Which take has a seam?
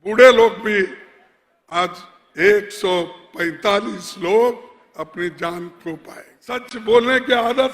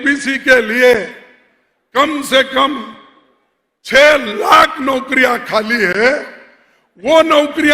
first; 1 cut; at 6.7 s

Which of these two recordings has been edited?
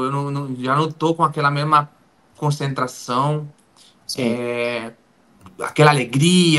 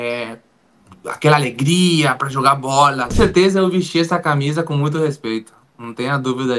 second; 1 cut; at 3.1 s

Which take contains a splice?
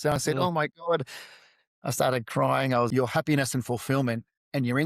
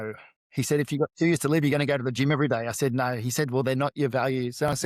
first; 1 cut; at 2.9 s

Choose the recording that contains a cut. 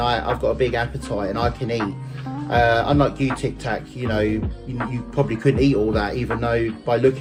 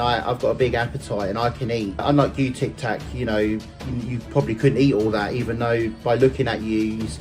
second; 1 cut; at 2.0 s

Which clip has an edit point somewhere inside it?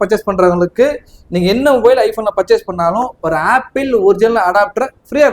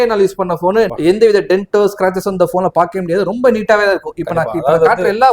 second; 1 cut; at 0.9 s

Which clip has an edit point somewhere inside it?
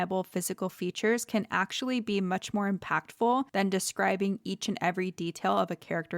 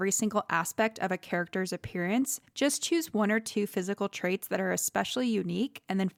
first; 1 cut; at 3.5 s

